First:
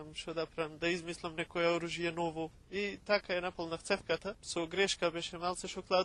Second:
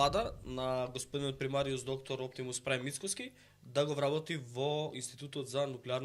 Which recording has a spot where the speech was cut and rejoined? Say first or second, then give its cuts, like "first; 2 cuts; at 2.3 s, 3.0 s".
first; 2 cuts; at 2.6 s, 4.4 s